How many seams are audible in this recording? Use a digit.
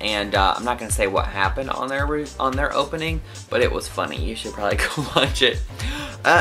0